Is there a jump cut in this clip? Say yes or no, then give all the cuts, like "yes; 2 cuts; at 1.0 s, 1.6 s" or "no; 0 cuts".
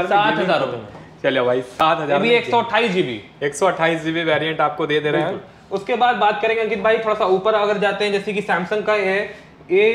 no; 0 cuts